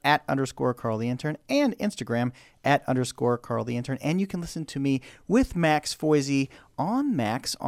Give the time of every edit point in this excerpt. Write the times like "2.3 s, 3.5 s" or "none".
none